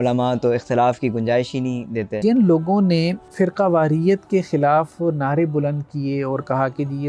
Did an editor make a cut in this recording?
yes; 2 cuts; at 2.2 s, 3.2 s

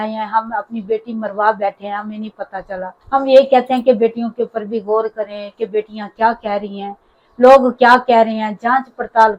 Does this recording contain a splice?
no; 0 cuts

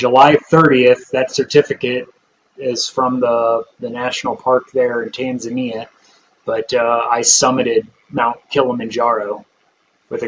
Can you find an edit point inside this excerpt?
no; 0 cuts

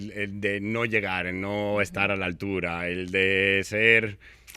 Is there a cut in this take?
no; 0 cuts

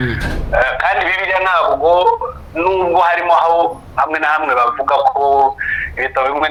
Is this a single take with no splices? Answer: yes; 0 cuts

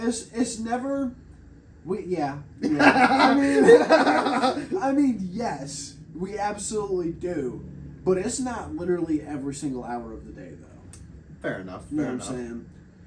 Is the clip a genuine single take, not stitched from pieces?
yes; 0 cuts

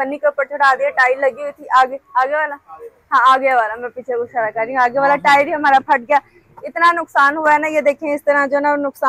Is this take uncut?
yes; 0 cuts

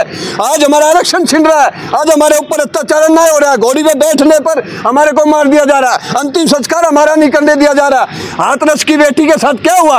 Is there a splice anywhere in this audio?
no; 0 cuts

